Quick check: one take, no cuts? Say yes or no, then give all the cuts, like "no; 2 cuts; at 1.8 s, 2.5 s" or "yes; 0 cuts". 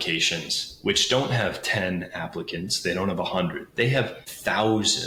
yes; 0 cuts